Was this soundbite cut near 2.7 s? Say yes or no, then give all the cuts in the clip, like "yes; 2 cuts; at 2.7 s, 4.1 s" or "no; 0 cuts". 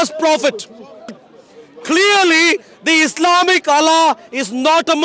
no; 1 cut; at 1.3 s